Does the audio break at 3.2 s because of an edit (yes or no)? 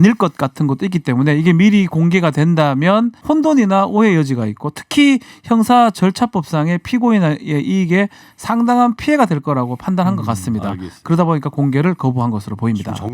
yes